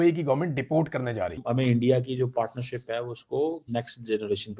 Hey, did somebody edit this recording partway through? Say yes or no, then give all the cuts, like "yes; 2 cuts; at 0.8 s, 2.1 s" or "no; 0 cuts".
yes; 2 cuts; at 1.4 s, 3.6 s